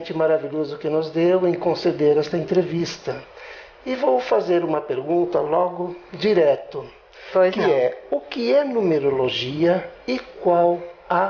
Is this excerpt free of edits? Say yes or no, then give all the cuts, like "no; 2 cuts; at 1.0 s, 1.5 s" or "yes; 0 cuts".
no; 1 cut; at 5.8 s